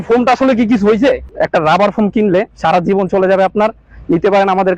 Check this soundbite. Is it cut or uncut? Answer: cut